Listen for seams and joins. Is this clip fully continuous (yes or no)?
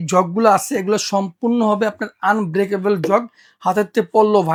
yes